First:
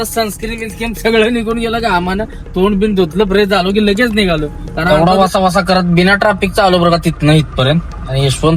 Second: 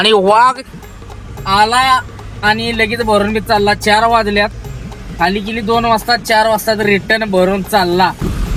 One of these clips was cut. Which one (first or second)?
first